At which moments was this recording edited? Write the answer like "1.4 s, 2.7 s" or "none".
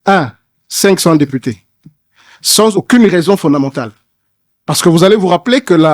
2.7 s